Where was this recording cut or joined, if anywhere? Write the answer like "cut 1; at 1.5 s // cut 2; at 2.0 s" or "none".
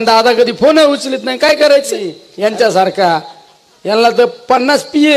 cut 1; at 2.2 s